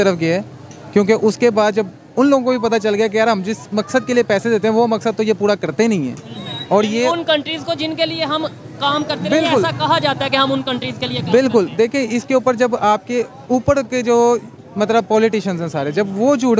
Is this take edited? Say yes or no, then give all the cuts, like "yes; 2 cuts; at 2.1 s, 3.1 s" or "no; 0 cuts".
no; 0 cuts